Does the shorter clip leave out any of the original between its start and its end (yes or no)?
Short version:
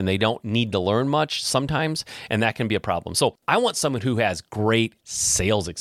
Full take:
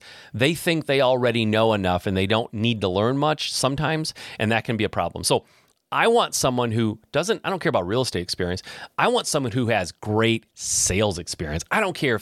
yes